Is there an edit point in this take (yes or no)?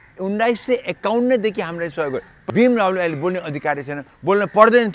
yes